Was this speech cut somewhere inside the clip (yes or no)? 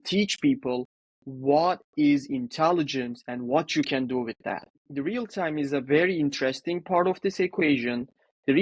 yes